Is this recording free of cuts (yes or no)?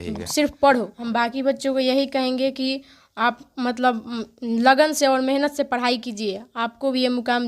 no